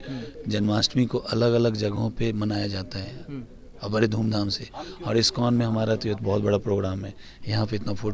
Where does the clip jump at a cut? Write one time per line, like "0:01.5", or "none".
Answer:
none